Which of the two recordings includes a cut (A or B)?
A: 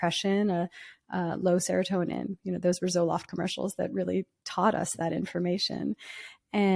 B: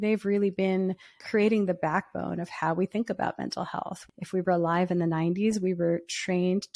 B